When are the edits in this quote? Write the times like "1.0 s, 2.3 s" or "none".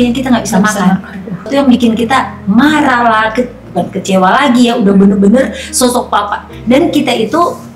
1.5 s